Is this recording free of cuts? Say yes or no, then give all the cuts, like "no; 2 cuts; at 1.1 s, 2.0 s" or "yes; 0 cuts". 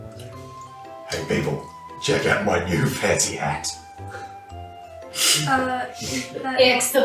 yes; 0 cuts